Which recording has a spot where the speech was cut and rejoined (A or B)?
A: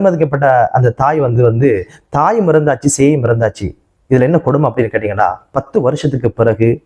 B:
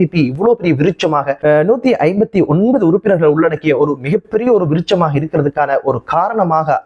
B